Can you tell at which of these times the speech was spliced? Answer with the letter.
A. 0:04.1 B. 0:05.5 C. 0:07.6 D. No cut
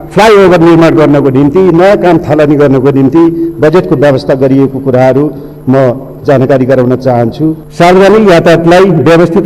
C